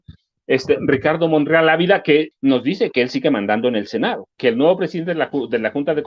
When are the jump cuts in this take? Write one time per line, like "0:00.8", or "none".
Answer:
0:02.3
0:04.4